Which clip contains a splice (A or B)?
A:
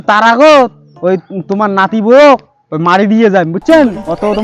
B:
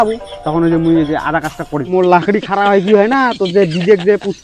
B